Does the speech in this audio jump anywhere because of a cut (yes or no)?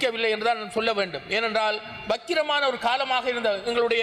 no